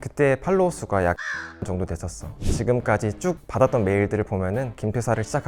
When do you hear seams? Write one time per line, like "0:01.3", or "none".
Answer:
0:02.4